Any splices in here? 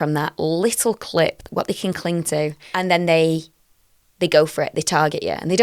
yes; 1 cut; at 2.6 s

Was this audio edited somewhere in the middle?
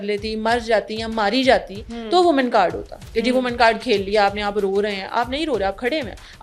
no; 0 cuts

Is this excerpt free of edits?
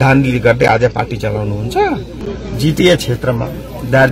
no; 1 cut; at 2.2 s

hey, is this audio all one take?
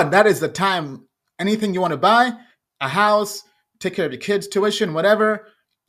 yes; 0 cuts

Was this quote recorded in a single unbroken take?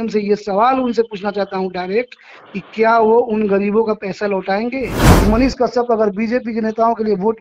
no; 1 cut; at 5.1 s

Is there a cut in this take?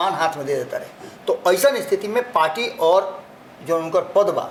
no; 0 cuts

